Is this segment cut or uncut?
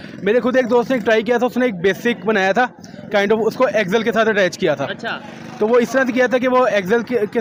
uncut